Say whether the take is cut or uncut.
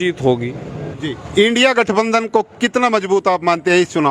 cut